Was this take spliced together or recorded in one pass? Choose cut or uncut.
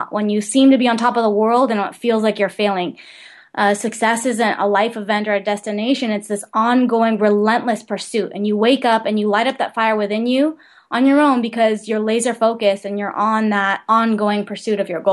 cut